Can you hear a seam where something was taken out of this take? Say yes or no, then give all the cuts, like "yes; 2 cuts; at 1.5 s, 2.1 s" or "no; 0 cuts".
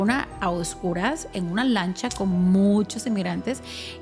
no; 0 cuts